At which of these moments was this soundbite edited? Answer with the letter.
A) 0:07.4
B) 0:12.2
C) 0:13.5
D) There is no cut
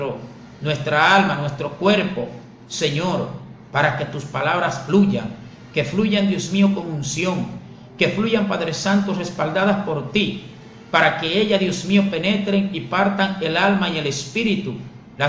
C